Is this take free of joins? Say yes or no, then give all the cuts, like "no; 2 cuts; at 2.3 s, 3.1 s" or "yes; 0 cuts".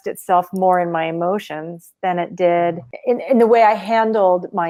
yes; 0 cuts